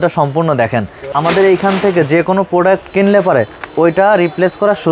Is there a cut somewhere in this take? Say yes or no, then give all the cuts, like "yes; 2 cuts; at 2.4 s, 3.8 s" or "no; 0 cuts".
yes; 1 cut; at 0.9 s